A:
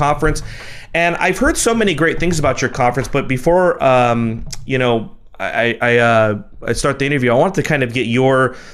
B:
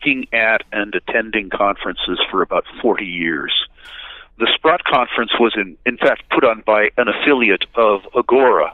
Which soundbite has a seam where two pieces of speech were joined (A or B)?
B